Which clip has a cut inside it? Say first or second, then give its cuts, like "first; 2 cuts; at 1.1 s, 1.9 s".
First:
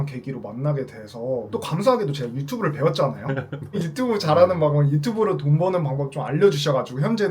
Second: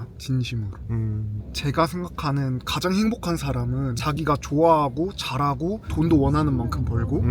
first; 1 cut; at 1.5 s